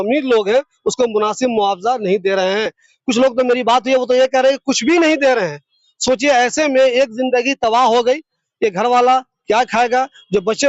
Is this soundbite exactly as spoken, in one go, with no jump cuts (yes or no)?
yes